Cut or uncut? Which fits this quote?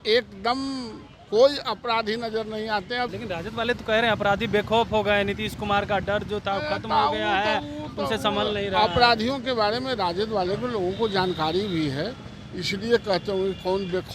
cut